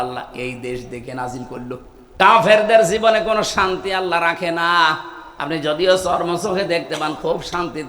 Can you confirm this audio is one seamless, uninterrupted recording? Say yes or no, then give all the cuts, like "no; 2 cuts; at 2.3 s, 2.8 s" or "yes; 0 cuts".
no; 1 cut; at 2.2 s